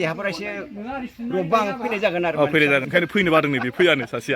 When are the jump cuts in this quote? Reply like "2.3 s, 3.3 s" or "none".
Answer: 2.9 s